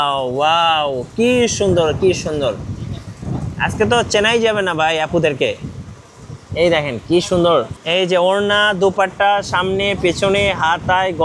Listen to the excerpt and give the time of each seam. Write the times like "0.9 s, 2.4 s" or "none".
7.8 s